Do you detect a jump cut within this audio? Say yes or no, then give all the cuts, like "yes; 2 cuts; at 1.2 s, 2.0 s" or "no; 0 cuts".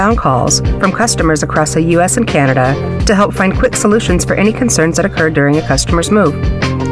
no; 0 cuts